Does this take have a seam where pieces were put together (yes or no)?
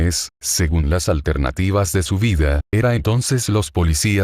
yes